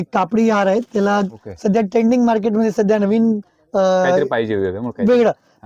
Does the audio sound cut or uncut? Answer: uncut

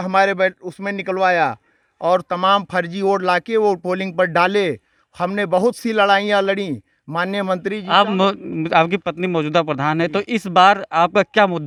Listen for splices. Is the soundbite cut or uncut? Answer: uncut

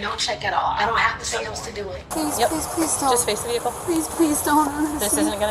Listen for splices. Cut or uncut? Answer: cut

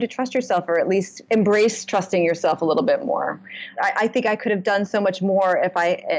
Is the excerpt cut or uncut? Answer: cut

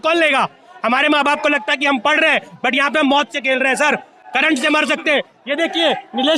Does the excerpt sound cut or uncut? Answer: uncut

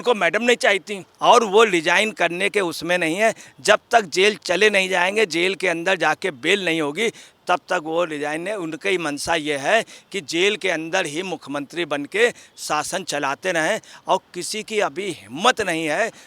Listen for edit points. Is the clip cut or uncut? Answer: cut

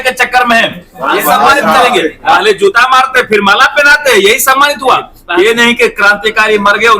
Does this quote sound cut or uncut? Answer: cut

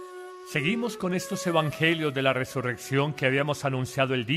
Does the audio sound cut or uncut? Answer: cut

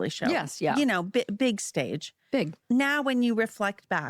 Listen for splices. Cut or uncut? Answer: cut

